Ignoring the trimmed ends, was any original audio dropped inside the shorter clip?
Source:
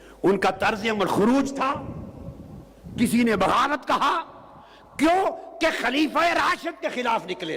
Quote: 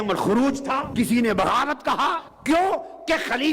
yes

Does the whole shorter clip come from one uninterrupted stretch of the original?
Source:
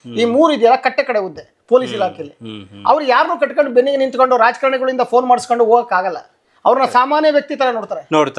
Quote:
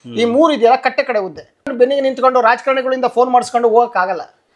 no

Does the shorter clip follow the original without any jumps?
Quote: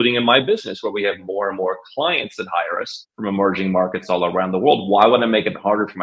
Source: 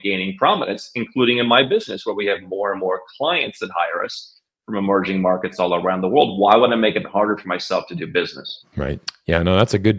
no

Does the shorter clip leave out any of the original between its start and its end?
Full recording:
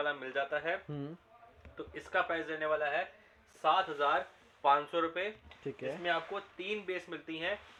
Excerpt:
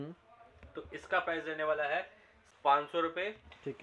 yes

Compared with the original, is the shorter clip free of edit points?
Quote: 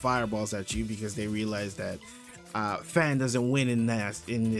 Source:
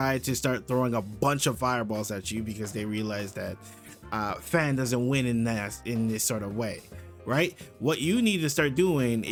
yes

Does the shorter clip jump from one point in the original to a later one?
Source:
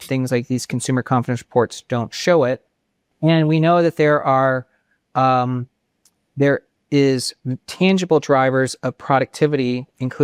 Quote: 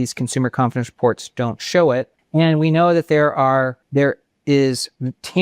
yes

